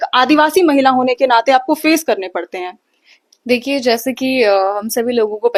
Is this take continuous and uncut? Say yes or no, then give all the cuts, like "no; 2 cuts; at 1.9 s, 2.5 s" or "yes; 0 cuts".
yes; 0 cuts